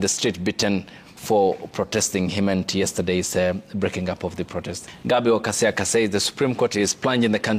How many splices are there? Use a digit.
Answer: 1